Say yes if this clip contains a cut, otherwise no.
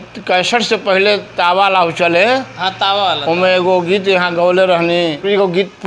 no